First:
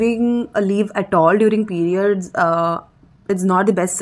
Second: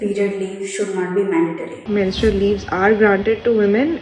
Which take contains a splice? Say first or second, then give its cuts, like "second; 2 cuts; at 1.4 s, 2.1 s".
second; 1 cut; at 1.9 s